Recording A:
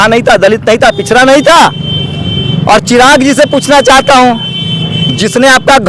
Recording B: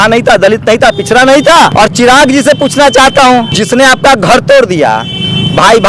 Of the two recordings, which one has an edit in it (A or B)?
B